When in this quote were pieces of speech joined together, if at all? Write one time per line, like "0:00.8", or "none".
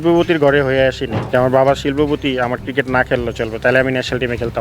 0:01.1